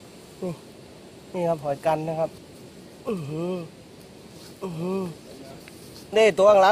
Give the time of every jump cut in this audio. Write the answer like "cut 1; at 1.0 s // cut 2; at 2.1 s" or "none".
none